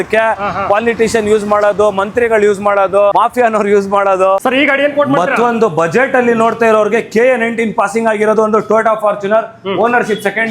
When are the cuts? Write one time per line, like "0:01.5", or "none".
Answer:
0:03.1
0:04.4